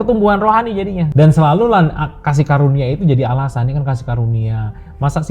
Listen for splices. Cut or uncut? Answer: cut